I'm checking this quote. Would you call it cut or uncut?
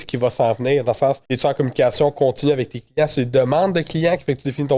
cut